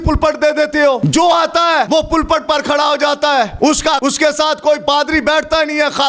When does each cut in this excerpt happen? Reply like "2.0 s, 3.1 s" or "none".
1.0 s, 1.9 s, 3.9 s, 4.8 s